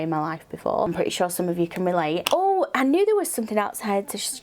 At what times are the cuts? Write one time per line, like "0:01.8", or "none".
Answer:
0:00.9
0:02.2